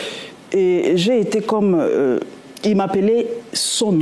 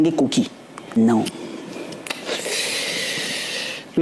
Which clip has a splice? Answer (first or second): second